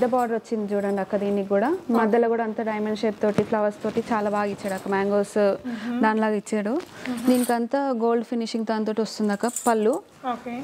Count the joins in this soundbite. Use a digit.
0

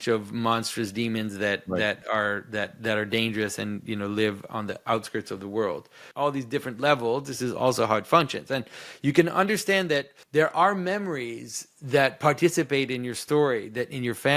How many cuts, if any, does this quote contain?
2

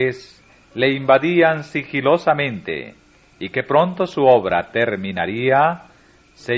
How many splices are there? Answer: 0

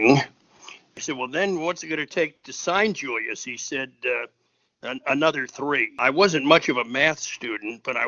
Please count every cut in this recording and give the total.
2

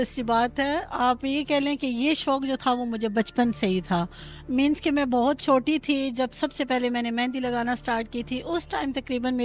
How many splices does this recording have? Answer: 0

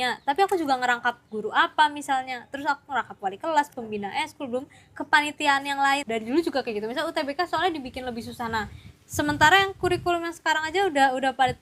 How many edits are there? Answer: 1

